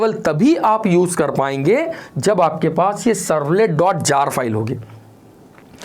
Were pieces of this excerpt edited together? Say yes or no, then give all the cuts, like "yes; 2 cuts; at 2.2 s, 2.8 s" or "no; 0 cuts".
no; 0 cuts